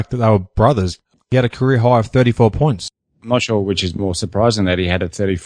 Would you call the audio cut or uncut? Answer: cut